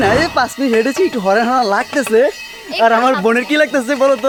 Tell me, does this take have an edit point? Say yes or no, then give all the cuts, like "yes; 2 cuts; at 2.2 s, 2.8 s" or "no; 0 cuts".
no; 0 cuts